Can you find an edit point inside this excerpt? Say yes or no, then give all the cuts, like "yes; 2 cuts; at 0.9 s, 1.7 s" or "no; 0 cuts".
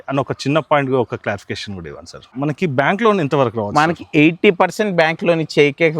yes; 1 cut; at 2.3 s